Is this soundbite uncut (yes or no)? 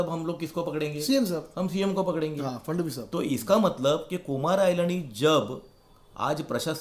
yes